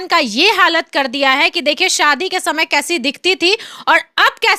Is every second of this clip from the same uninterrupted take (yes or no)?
yes